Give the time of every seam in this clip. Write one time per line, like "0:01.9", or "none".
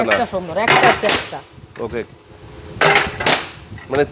none